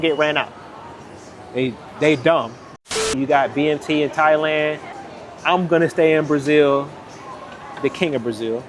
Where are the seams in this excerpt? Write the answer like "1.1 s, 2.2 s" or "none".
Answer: 3.2 s, 4.9 s

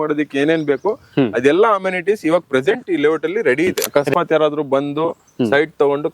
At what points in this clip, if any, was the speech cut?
3.8 s

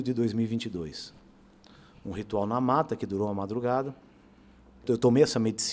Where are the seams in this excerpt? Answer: 4.8 s

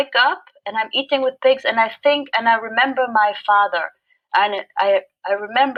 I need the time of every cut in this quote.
none

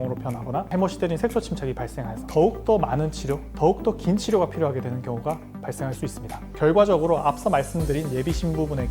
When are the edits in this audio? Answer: 6.4 s

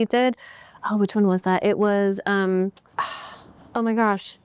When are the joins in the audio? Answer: 2.8 s

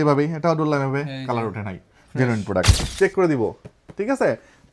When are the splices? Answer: 2.7 s

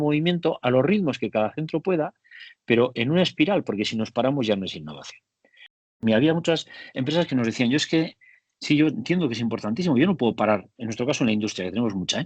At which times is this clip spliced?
6.0 s

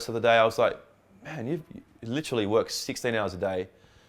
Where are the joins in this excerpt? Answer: none

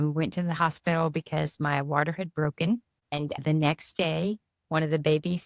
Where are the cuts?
3.0 s

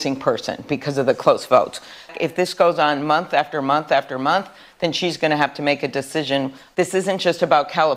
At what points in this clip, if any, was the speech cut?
6.6 s

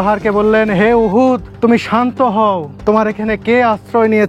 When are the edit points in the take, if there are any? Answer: 1.5 s, 2.7 s

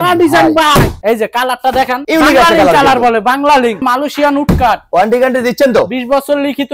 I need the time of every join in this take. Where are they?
1.0 s, 3.8 s

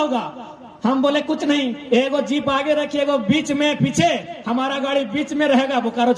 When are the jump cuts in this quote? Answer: none

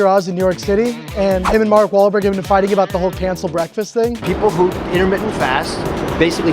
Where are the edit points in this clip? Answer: 1.5 s, 4.2 s

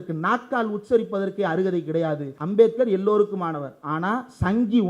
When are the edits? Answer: 2.3 s

